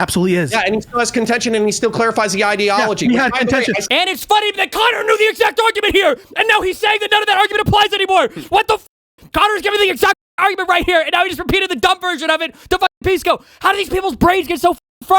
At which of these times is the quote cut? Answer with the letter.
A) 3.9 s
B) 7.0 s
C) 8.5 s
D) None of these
A